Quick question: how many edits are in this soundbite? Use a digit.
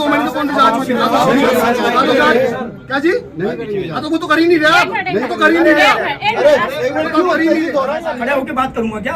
1